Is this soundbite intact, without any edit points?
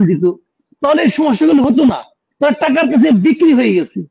yes; 0 cuts

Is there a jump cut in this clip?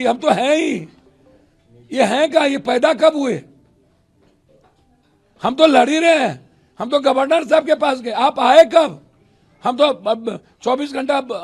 no; 0 cuts

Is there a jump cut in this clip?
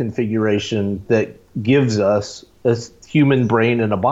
yes; 1 cut; at 3.0 s

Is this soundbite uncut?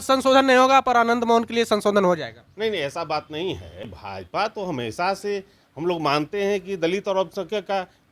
no; 1 cut; at 3.9 s

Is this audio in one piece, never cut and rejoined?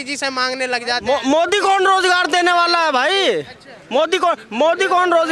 yes; 0 cuts

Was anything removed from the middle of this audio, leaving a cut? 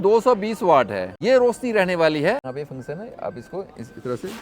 yes; 2 cuts; at 1.1 s, 2.5 s

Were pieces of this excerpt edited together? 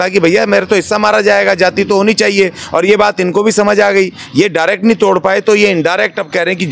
no; 0 cuts

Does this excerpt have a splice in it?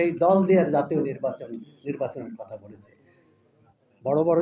no; 0 cuts

